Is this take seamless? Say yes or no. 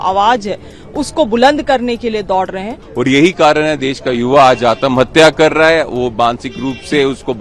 no